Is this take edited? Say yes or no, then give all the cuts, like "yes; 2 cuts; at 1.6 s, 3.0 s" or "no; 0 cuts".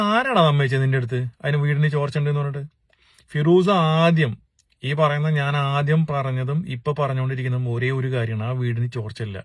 no; 0 cuts